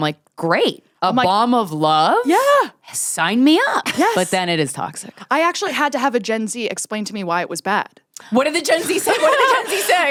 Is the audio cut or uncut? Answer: uncut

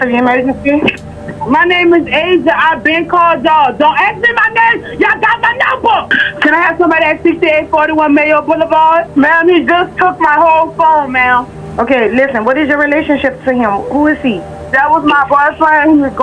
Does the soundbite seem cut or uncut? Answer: cut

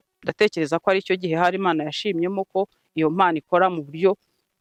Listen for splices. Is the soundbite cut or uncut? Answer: uncut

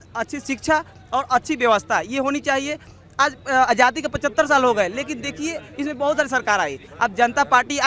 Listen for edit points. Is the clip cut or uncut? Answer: uncut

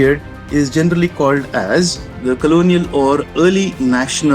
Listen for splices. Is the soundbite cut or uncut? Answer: cut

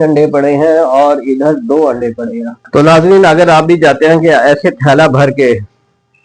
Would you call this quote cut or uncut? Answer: cut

